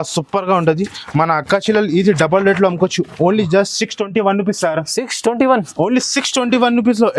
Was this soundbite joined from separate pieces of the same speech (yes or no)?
no